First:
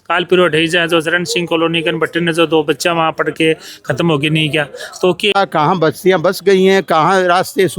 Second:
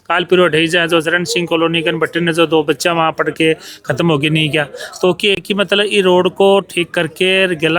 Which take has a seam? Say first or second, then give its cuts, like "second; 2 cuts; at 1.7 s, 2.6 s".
first; 1 cut; at 5.4 s